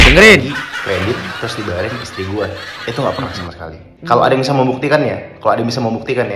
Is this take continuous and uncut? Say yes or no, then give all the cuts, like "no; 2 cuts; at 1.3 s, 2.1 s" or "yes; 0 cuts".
no; 1 cut; at 3.9 s